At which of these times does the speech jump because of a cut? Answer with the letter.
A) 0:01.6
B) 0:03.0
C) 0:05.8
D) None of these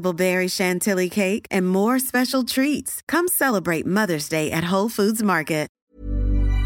C